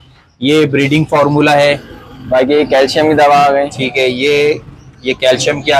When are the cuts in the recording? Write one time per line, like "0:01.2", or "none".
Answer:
none